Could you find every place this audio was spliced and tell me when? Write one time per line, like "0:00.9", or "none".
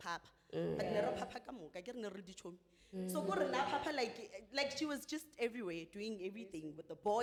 none